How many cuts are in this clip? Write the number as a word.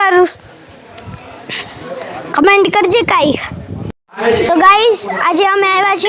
one